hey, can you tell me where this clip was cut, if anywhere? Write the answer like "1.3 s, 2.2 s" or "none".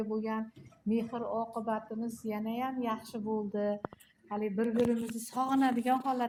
none